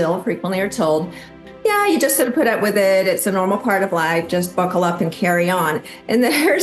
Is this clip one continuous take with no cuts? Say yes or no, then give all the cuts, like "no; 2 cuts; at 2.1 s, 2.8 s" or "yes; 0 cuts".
no; 1 cut; at 1.4 s